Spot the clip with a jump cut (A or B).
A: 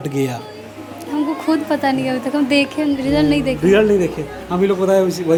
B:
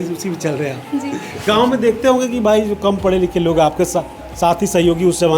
B